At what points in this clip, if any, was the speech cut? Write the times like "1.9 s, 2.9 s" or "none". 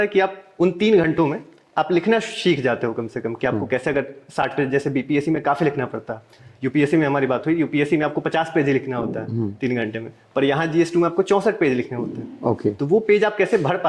none